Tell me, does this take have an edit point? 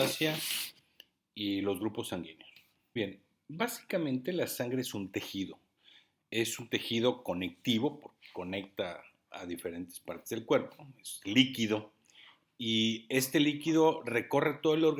yes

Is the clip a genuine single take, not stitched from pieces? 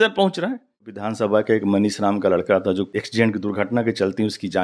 no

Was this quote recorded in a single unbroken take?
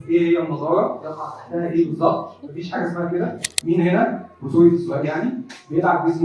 no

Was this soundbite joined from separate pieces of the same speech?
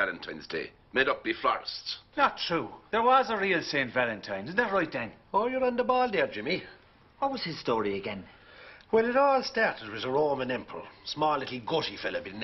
yes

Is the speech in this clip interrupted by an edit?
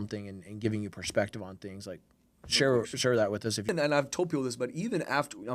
yes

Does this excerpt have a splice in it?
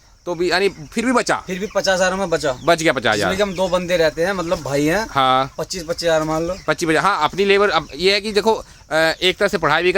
no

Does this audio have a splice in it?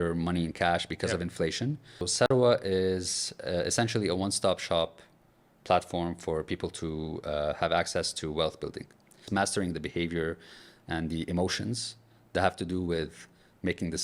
yes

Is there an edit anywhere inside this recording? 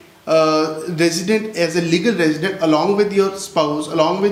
no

